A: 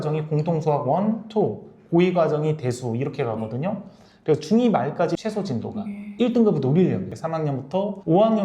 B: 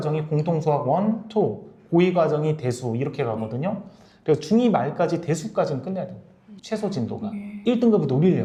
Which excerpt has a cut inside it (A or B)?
A